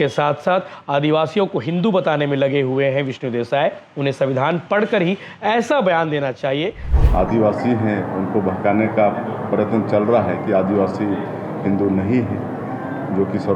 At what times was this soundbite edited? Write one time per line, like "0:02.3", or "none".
0:06.9